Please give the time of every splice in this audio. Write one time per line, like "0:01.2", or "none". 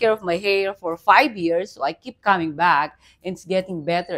none